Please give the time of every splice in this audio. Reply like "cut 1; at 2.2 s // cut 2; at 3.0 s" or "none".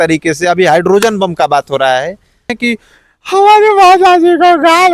cut 1; at 2.5 s